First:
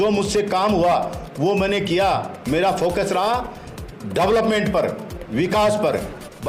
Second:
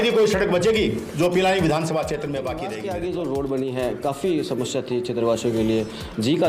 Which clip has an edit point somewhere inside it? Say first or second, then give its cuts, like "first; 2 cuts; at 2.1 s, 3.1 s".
second; 1 cut; at 2.7 s